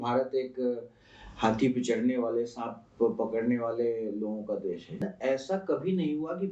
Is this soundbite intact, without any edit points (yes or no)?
no